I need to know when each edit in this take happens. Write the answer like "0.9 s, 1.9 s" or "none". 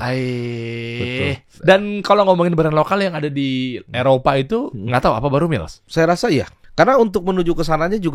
1.5 s, 4.8 s, 5.8 s, 6.6 s